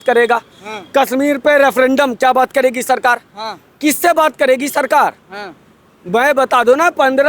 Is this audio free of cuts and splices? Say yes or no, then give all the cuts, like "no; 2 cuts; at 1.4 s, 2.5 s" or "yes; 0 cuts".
yes; 0 cuts